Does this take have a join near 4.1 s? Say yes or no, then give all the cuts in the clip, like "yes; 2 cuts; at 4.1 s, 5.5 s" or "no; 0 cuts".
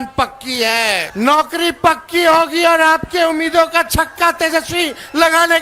no; 1 cut; at 1.1 s